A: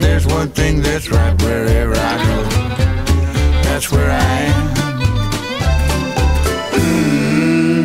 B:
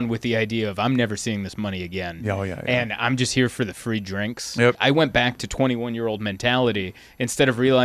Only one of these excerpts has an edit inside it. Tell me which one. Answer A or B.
B